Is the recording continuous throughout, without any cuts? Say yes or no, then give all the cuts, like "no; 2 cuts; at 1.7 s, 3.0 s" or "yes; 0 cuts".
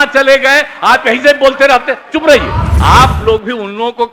no; 1 cut; at 2.6 s